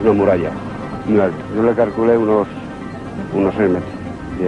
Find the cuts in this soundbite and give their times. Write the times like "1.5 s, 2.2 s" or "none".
1.4 s

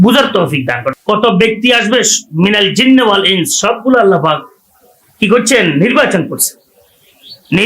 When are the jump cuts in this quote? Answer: 0.9 s

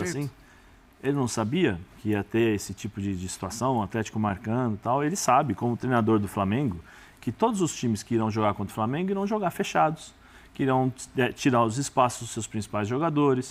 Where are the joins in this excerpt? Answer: none

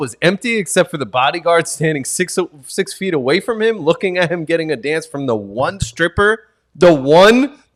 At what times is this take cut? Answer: none

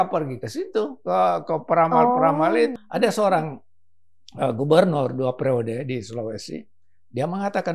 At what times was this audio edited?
2.7 s

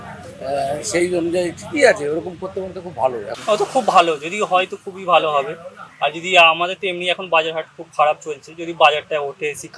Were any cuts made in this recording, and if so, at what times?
3.3 s

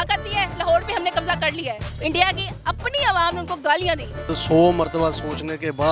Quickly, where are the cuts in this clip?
1.9 s, 4.3 s

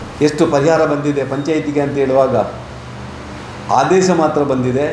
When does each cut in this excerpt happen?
none

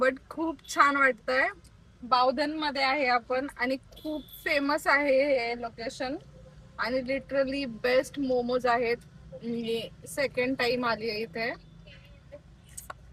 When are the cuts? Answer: none

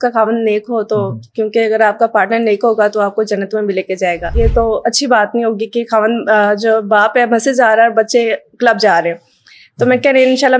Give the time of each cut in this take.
4.3 s

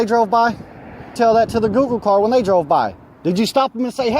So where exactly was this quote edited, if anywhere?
1.1 s

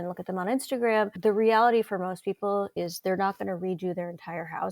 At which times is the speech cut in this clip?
1.2 s, 2.7 s

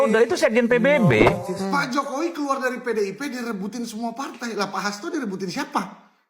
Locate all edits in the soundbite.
1.5 s

